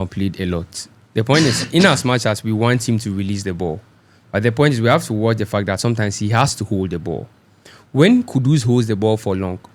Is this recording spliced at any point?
no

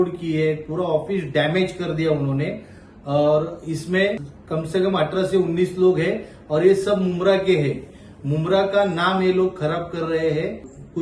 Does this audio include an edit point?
no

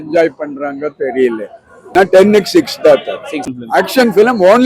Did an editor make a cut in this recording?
yes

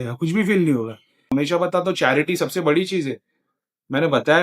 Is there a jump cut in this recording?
yes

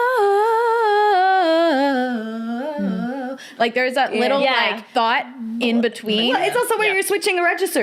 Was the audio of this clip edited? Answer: yes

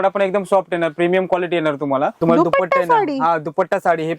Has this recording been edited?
yes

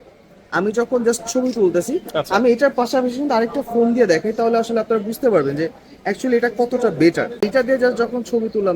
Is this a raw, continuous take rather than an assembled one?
no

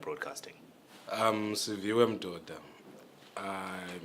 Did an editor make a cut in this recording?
yes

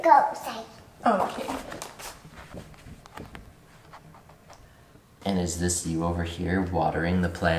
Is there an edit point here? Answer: yes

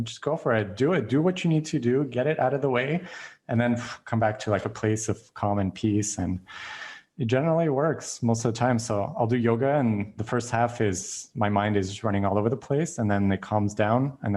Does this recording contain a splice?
no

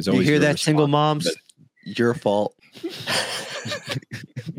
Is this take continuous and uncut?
no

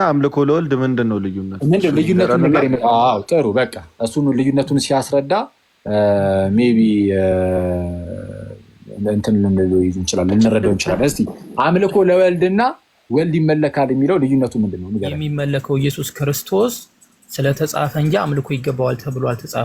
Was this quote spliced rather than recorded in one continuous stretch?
yes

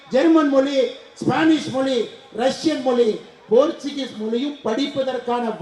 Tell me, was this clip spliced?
no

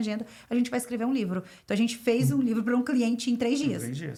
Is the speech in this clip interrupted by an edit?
no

